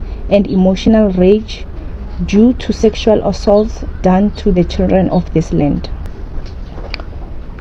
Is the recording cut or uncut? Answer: cut